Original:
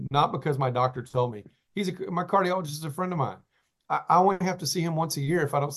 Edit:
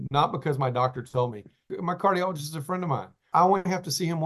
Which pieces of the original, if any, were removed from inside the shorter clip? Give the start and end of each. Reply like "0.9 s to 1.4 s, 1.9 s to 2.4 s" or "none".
1.7 s to 2.0 s, 3.6 s to 4.0 s